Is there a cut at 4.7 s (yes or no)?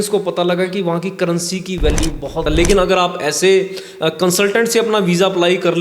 no